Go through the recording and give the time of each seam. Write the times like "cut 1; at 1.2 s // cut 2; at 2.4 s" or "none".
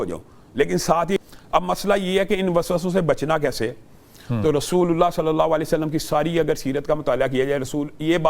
cut 1; at 1.2 s